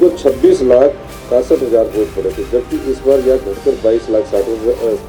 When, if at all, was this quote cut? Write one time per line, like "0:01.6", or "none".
none